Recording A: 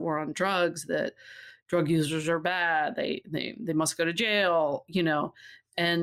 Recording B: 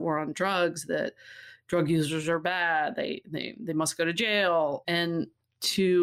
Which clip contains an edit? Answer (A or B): B